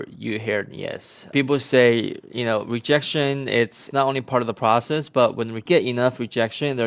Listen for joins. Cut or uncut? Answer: cut